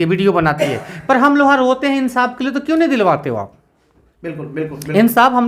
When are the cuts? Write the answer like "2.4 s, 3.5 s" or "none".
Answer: none